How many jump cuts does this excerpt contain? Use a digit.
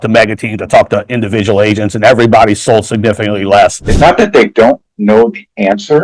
1